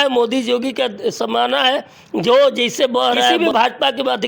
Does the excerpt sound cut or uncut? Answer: cut